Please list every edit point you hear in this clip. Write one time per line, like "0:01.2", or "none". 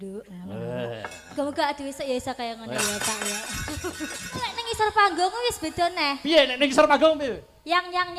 0:04.6